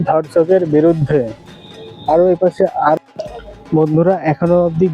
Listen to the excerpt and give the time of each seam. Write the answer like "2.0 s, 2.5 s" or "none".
3.0 s